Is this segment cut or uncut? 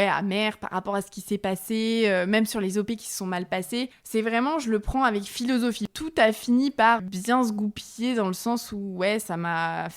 cut